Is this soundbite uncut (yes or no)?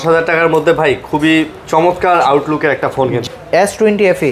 no